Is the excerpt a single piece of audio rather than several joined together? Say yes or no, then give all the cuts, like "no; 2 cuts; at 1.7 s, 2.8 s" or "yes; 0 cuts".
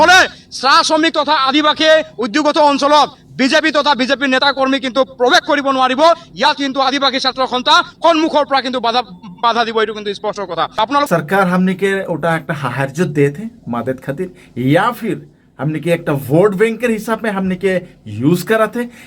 no; 1 cut; at 11.1 s